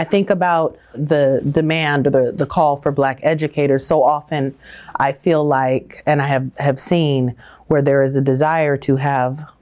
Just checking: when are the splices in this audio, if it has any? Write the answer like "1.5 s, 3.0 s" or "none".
1.0 s